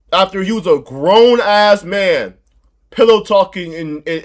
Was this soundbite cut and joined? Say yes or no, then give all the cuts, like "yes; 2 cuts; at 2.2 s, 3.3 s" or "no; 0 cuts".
no; 0 cuts